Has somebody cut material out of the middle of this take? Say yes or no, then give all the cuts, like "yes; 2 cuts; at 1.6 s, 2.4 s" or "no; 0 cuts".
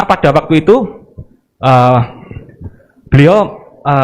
no; 0 cuts